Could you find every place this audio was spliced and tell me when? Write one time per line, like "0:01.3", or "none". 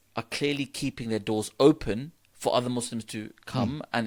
none

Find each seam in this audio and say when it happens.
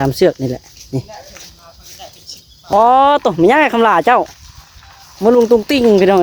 0:02.7

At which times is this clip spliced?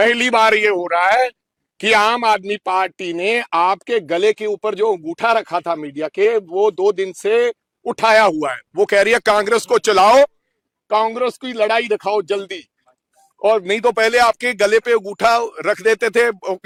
none

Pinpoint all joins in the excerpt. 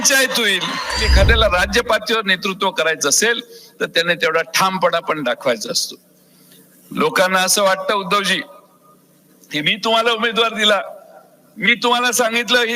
0:01.0

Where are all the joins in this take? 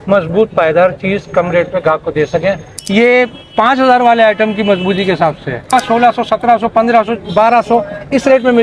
0:02.7
0:05.7

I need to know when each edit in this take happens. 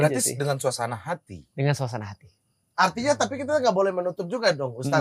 none

